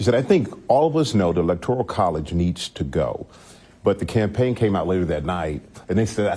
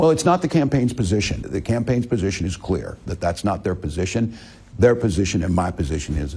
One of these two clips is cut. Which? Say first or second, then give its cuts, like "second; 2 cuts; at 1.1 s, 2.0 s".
second; 1 cut; at 1.4 s